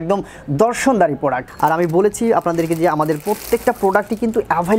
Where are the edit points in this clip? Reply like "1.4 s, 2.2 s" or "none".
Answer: 1.4 s